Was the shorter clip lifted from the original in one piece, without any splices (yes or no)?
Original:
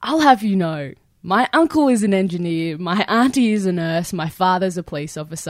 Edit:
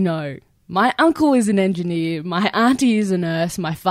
yes